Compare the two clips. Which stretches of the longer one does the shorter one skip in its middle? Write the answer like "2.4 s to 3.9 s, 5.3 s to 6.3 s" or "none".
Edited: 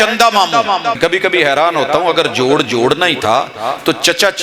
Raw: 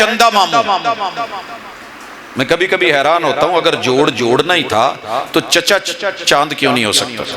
1.0 s to 2.5 s